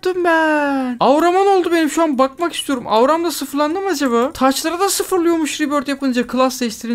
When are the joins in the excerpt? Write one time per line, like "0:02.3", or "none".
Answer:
none